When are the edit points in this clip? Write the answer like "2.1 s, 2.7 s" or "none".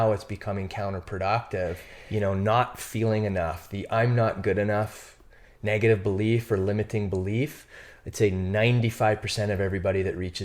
1.9 s